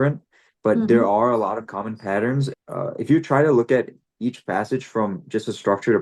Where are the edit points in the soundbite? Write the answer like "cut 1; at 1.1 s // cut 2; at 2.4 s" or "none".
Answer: cut 1; at 2.5 s